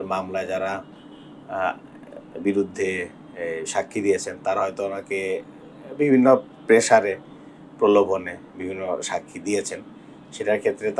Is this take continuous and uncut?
yes; 0 cuts

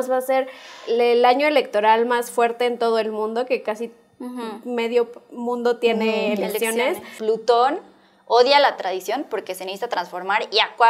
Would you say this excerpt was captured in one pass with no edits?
no; 1 cut; at 7.1 s

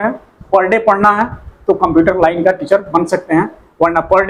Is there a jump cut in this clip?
no; 0 cuts

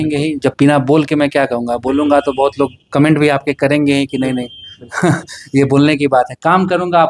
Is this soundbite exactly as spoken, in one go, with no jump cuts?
yes; 0 cuts

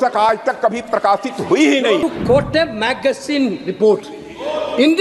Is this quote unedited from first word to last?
no; 1 cut; at 2.0 s

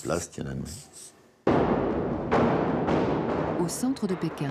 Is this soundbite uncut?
no; 1 cut; at 2.2 s

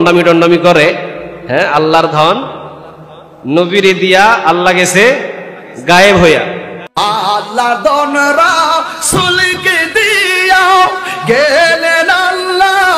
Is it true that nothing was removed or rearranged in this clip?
yes; 0 cuts

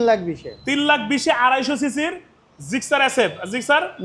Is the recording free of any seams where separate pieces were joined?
yes; 0 cuts

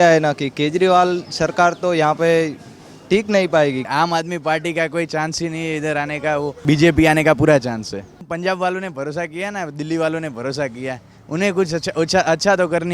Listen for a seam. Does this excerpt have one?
yes; 3 cuts; at 3.9 s, 6.6 s, 8.2 s

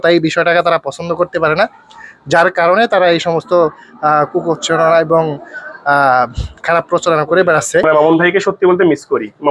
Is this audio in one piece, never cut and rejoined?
no; 1 cut; at 7.9 s

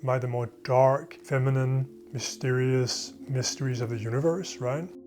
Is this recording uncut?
no; 1 cut; at 1.2 s

